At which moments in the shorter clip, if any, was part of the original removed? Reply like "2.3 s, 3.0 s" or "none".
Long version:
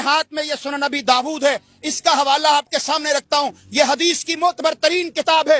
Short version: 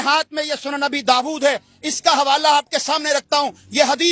none